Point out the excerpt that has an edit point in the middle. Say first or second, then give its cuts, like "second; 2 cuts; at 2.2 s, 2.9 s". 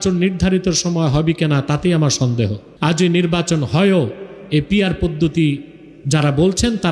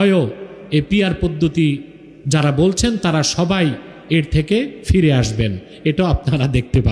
first; 1 cut; at 2.6 s